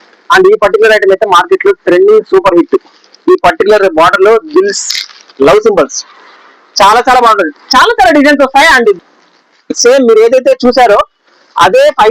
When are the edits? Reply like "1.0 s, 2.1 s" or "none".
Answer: 9.0 s